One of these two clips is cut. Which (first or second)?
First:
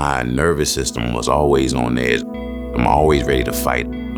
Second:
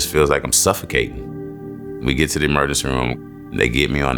second